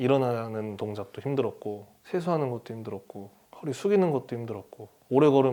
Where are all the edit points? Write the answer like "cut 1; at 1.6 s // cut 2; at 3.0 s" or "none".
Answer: none